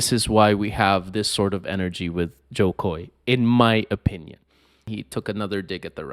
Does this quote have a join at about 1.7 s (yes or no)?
no